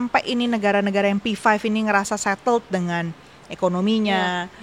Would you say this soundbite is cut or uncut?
uncut